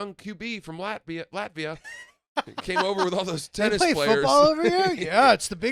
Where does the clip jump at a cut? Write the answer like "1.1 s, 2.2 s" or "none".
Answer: none